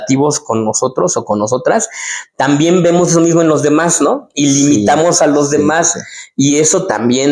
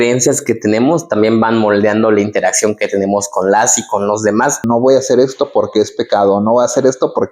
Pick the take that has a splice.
second; 1 cut; at 4.6 s

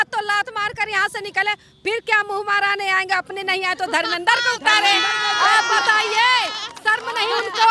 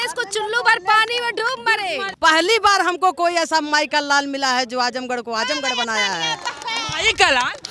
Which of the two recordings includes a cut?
second; 1 cut; at 2.1 s

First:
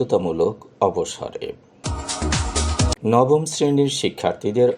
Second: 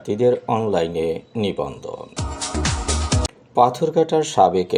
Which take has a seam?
first; 1 cut; at 3.0 s

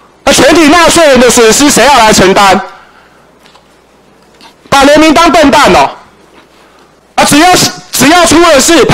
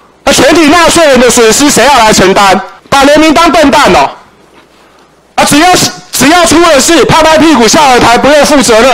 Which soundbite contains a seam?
second; 1 cut; at 2.7 s

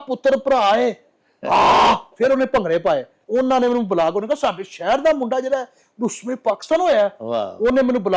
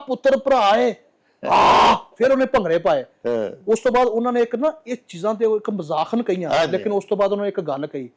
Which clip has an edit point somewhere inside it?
first; 1 cut; at 3.2 s

